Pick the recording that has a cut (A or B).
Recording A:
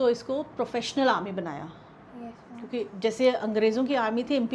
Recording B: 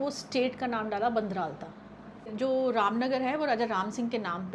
B